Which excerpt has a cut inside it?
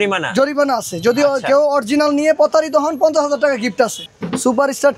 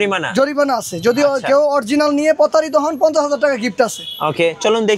first; 1 cut; at 4.1 s

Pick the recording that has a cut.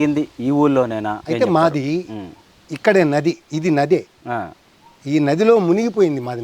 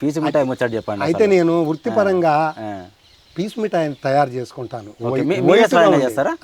first; 1 cut; at 1.2 s

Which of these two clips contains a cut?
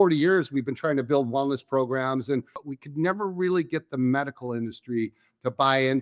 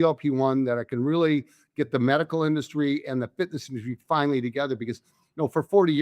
first; 1 cut; at 2.6 s

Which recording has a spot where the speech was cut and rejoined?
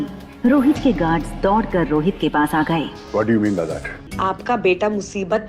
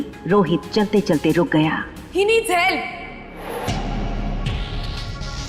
first; 1 cut; at 4.1 s

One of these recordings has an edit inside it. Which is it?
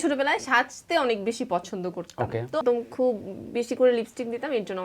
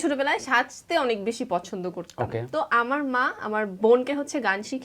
first; 1 cut; at 2.6 s

